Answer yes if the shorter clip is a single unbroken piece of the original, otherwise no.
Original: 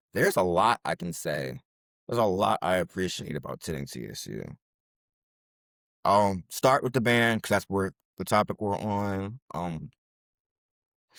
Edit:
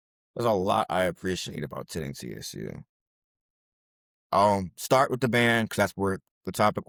yes